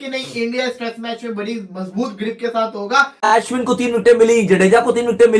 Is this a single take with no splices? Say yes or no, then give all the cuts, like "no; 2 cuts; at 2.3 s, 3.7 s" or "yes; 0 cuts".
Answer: no; 1 cut; at 3.1 s